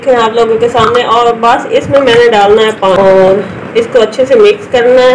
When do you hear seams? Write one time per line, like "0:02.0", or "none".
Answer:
0:02.8